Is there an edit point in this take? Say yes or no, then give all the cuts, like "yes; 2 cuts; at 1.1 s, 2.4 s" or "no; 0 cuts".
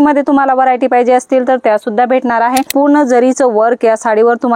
yes; 1 cut; at 2.7 s